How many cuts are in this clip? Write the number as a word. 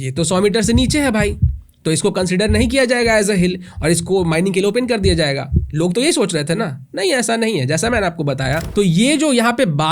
one